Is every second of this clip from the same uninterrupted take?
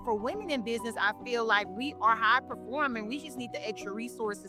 yes; 0 cuts

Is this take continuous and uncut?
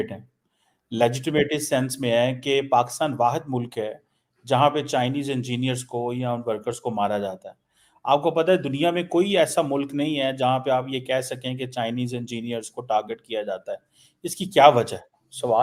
yes; 0 cuts

